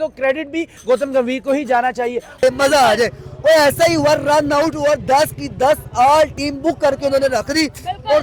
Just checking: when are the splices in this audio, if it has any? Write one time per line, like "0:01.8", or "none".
0:02.4